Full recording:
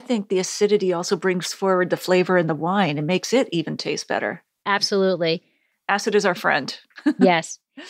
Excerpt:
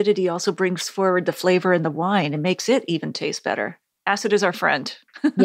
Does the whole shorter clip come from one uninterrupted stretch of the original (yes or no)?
no